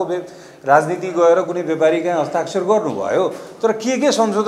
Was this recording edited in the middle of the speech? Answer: no; 0 cuts

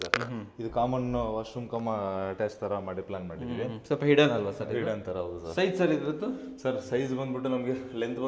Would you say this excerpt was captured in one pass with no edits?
yes; 0 cuts

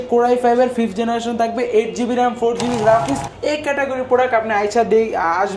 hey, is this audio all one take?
no; 1 cut; at 3.3 s

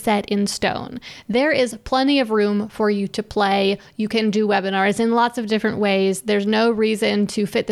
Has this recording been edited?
no; 0 cuts

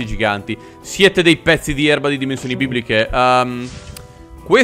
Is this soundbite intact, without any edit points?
yes; 0 cuts

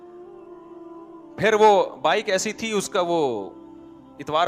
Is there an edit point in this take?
yes; 1 cut; at 1.2 s

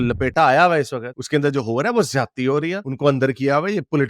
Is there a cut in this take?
no; 0 cuts

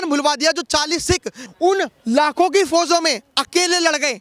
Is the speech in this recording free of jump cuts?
no; 1 cut; at 1.4 s

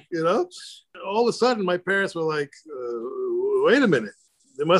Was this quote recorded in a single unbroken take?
no; 1 cut; at 1.0 s

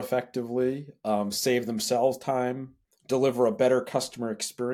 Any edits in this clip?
no; 0 cuts

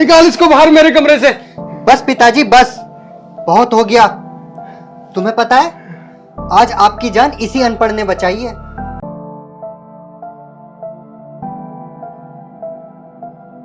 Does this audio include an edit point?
yes; 1 cut; at 9.0 s

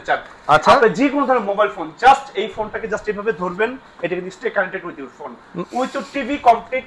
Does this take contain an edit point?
no; 0 cuts

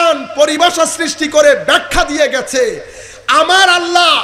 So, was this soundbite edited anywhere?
no; 0 cuts

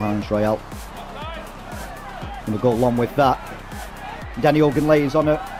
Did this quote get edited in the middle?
no; 0 cuts

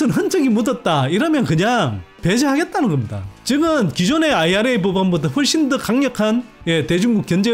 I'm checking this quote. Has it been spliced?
no; 0 cuts

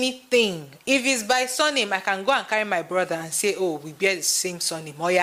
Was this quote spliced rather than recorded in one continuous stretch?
no; 0 cuts

